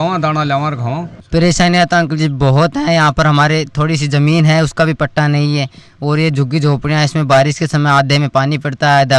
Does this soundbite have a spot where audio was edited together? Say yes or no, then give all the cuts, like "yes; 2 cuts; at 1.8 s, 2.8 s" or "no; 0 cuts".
yes; 1 cut; at 1.1 s